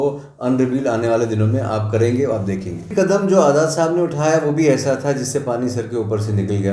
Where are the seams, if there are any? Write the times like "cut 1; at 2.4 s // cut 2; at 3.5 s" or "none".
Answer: cut 1; at 2.9 s